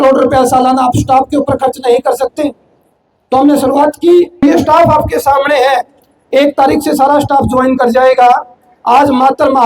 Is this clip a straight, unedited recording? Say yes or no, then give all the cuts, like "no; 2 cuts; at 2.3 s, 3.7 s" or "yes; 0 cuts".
no; 1 cut; at 4.4 s